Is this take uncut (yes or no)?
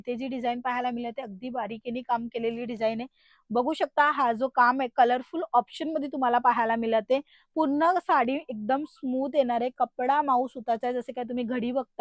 yes